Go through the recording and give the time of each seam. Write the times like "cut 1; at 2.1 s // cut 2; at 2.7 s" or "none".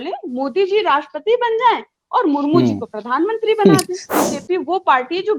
cut 1; at 4.1 s